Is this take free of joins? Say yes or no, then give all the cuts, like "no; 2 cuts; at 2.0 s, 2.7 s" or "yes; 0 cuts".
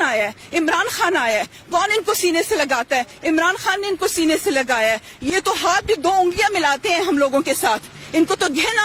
yes; 0 cuts